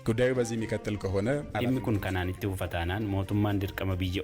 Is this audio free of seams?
no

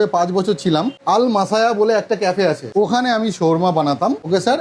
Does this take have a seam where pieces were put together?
yes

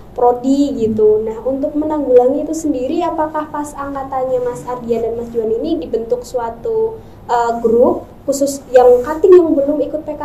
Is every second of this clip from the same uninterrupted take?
yes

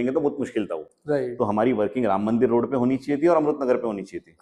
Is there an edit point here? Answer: no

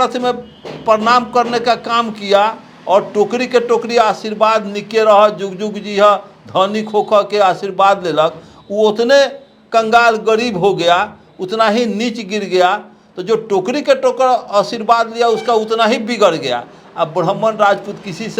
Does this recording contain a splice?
no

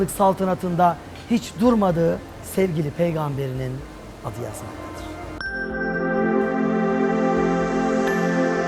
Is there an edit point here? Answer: yes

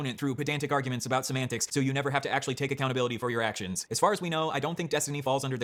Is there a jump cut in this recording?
no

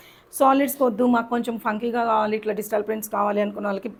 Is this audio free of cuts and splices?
yes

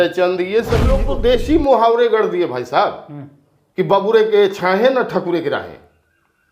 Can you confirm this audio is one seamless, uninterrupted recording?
no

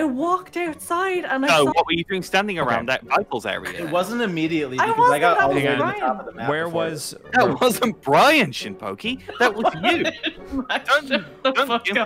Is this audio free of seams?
yes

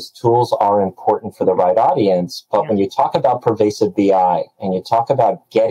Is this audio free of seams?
yes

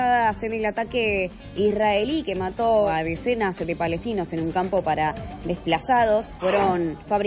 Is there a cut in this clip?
no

